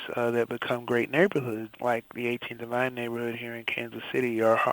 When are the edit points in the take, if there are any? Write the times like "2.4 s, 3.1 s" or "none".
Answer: 1.7 s